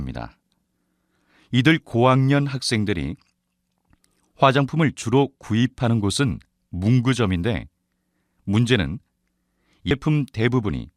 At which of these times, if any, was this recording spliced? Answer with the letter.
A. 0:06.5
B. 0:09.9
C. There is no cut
B